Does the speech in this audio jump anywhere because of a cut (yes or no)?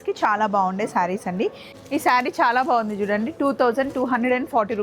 yes